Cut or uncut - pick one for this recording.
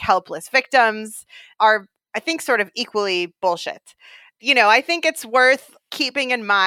cut